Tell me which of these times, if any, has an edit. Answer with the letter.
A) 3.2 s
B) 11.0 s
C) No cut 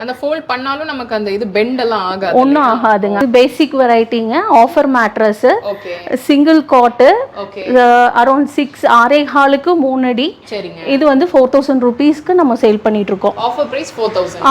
A